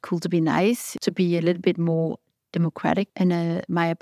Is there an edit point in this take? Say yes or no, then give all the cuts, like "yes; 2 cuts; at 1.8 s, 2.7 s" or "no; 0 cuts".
yes; 2 cuts; at 0.9 s, 3.1 s